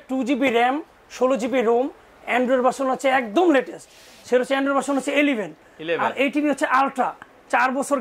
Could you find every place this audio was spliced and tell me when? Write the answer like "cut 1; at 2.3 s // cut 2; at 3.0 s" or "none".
none